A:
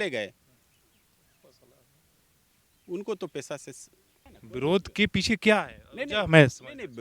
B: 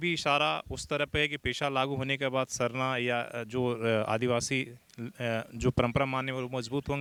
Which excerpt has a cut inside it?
A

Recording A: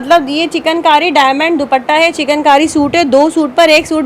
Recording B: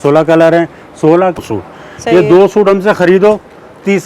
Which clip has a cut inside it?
B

